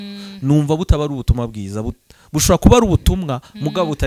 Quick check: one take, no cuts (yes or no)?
yes